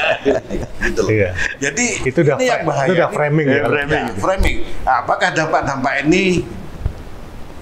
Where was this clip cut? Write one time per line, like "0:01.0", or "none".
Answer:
none